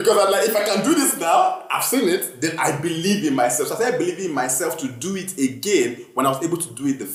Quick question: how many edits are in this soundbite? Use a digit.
0